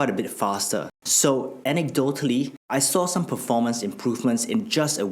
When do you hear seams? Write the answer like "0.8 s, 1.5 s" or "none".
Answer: 1.0 s, 2.6 s